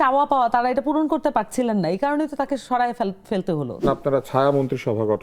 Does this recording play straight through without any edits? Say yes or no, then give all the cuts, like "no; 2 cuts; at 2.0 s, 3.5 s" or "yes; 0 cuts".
no; 1 cut; at 3.8 s